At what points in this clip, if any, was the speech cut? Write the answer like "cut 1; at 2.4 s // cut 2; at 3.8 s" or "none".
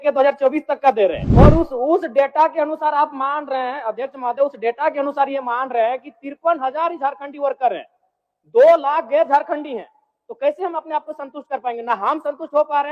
cut 1; at 1.2 s